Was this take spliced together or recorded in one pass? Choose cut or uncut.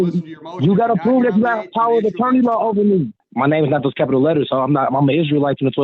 cut